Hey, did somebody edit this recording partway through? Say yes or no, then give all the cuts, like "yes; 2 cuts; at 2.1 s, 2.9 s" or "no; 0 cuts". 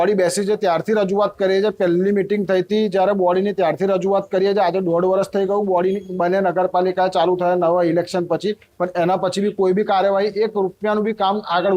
no; 0 cuts